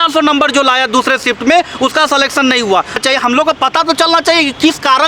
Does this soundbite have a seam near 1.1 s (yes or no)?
no